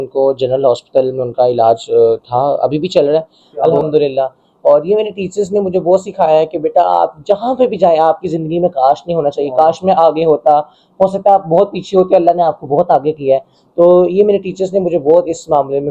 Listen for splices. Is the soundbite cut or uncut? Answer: cut